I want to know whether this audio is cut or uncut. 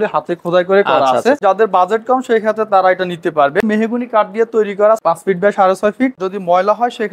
cut